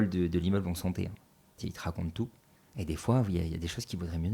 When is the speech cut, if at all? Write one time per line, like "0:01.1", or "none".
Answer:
0:01.5